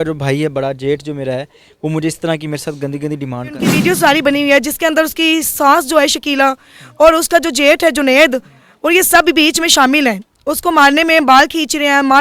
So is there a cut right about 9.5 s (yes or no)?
no